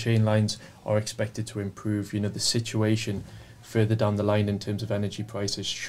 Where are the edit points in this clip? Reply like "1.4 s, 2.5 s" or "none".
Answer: none